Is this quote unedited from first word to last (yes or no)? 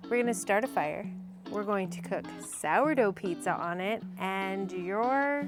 yes